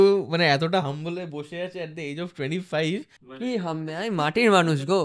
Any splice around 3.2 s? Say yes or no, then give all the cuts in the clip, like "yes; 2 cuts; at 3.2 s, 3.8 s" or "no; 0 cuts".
yes; 1 cut; at 3.2 s